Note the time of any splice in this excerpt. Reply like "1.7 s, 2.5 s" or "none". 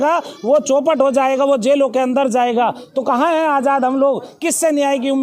none